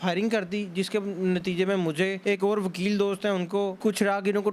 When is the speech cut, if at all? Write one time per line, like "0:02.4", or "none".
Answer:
0:02.2
0:03.7